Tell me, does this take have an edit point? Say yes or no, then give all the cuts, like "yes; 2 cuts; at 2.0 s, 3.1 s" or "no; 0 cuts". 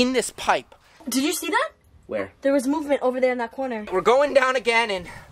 yes; 2 cuts; at 1.0 s, 3.9 s